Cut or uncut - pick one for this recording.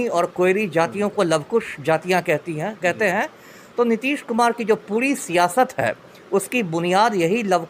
uncut